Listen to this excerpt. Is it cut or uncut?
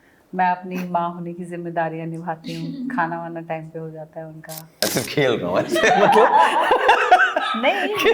cut